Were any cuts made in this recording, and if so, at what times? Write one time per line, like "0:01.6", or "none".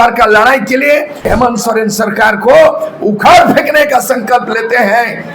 0:01.3